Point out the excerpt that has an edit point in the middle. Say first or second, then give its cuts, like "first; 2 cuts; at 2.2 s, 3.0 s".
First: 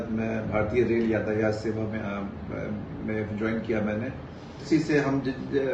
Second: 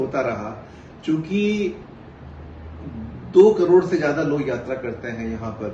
first; 1 cut; at 4.6 s